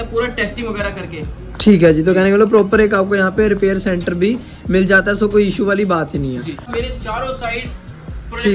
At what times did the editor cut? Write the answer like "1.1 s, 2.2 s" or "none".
6.7 s